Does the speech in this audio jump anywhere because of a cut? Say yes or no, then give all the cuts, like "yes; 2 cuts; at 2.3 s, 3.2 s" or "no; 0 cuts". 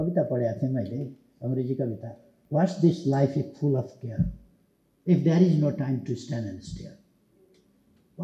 yes; 1 cut; at 2.4 s